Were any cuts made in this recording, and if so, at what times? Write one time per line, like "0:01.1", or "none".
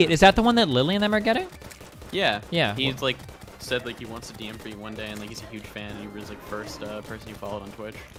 none